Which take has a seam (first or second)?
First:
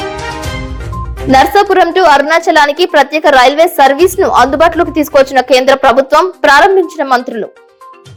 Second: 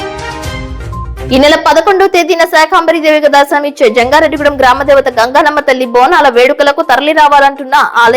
second